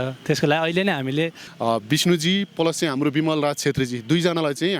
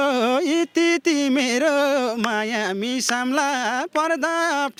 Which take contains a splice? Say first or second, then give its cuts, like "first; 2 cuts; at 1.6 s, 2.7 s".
first; 1 cut; at 1.5 s